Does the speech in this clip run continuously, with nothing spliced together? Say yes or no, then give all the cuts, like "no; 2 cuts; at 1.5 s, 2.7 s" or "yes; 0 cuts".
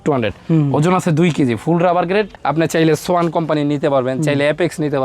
no; 1 cut; at 2.3 s